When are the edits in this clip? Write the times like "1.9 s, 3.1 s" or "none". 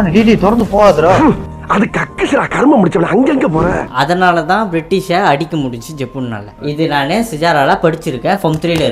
1.2 s, 3.8 s